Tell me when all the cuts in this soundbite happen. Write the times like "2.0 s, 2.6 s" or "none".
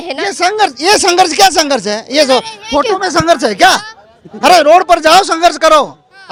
none